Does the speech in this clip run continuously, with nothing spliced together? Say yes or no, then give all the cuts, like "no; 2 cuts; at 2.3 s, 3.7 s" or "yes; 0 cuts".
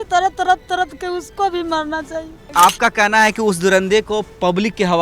no; 1 cut; at 2.4 s